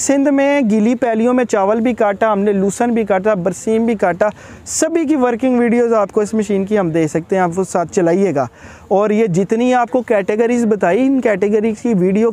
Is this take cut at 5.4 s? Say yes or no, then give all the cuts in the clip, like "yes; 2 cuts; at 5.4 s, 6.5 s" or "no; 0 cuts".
no; 0 cuts